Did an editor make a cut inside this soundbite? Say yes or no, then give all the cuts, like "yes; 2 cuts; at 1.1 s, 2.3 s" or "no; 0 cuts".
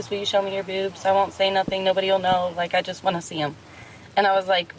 no; 0 cuts